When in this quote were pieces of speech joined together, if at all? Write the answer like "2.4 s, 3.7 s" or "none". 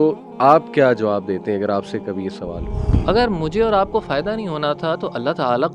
3.0 s

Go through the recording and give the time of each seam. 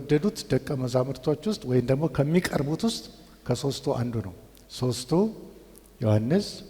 none

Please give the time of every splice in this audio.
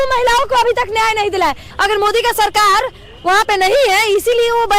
1.6 s

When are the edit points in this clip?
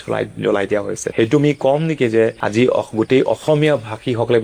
1.0 s, 2.4 s

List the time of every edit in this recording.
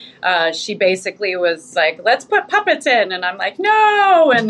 1.6 s

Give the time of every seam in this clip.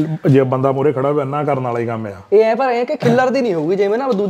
none

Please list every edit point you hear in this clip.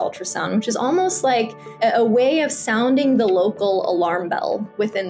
1.8 s

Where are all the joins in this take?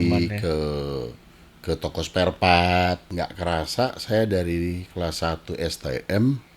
3.1 s

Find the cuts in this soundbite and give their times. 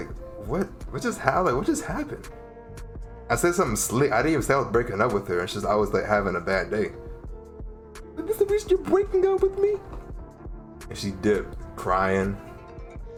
none

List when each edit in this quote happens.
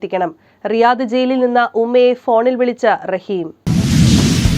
3.6 s

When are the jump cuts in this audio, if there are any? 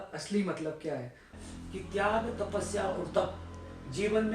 1.3 s

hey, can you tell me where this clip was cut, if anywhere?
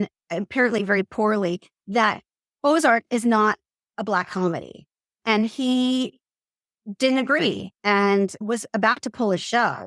5.2 s, 8.4 s

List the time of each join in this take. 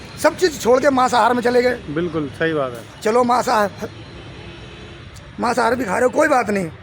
none

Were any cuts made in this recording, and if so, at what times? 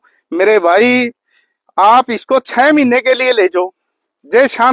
none

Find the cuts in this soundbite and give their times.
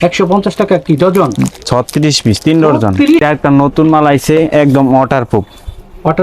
3.2 s

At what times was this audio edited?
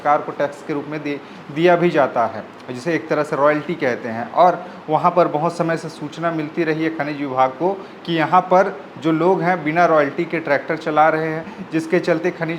none

